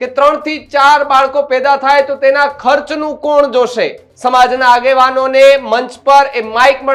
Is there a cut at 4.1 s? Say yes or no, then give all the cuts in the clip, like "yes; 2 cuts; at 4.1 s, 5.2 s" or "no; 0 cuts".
yes; 1 cut; at 4.1 s